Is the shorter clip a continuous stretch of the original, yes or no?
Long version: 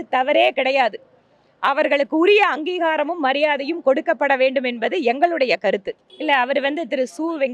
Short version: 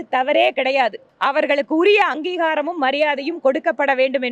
no